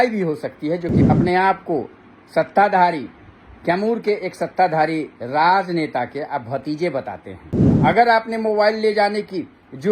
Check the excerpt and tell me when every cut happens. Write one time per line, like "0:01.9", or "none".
0:01.0
0:07.6